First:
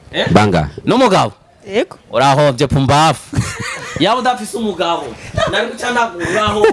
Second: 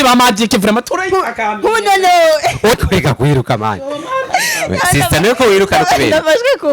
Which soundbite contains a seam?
second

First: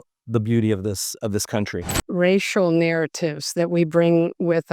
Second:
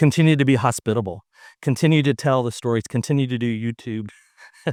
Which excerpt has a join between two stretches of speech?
first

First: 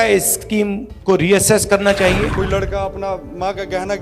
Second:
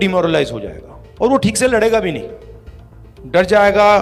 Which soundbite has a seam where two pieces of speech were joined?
first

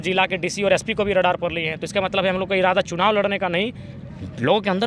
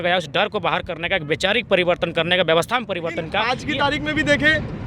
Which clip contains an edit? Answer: second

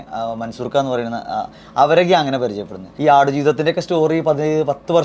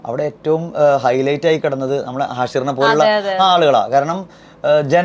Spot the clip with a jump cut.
first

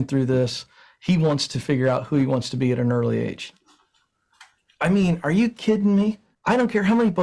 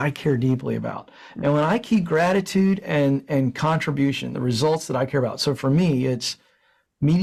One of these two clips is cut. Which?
first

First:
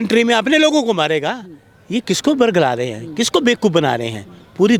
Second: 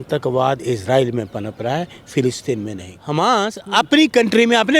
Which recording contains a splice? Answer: second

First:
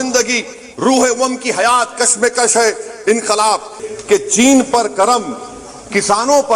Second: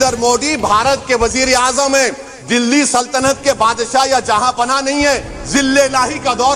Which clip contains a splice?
first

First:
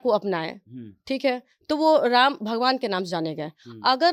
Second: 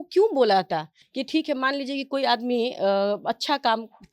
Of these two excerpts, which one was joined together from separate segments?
second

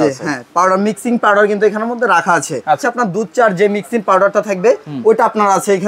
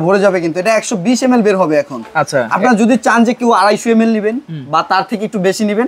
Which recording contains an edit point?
first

